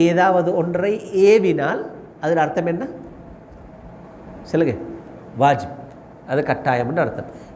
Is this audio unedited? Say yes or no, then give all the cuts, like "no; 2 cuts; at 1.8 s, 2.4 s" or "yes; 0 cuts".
yes; 0 cuts